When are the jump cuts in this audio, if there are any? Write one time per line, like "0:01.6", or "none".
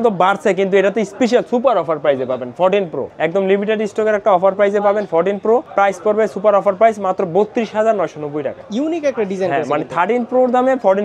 none